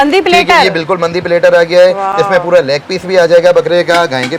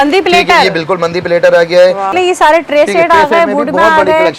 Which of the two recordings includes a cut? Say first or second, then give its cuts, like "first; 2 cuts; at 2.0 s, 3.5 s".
second; 1 cut; at 2.1 s